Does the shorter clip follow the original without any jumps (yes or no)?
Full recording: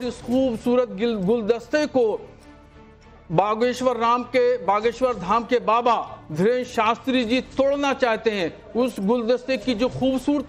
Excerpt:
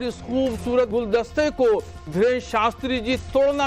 no